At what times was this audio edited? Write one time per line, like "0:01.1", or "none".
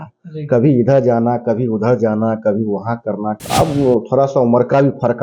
0:03.3